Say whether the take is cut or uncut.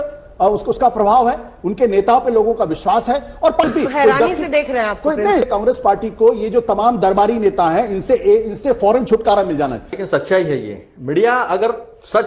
cut